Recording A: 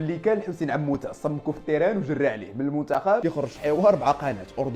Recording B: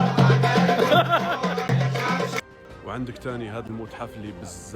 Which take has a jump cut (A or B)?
B